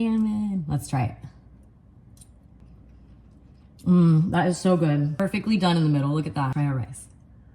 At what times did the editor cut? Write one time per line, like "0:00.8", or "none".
0:02.6
0:05.2
0:06.5